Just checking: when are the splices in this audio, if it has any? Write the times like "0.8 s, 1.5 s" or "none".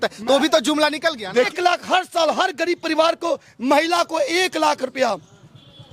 1.5 s